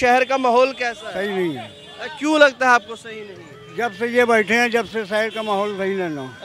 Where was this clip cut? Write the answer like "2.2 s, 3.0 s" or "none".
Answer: none